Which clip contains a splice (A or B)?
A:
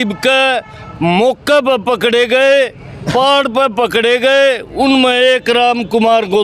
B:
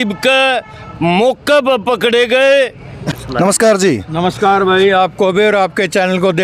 B